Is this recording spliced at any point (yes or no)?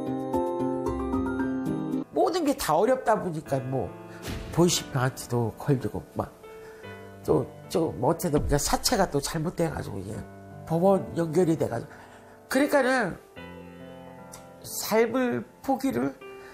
yes